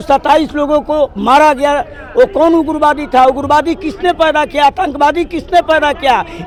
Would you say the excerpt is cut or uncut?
uncut